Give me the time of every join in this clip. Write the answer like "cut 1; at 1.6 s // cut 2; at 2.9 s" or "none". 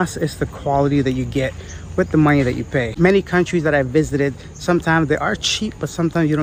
none

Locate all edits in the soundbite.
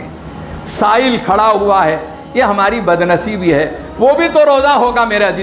none

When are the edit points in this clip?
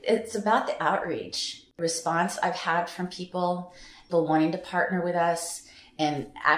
cut 1; at 1.8 s // cut 2; at 4.0 s

